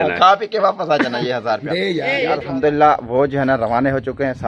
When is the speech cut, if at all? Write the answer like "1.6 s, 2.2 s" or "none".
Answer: 2.3 s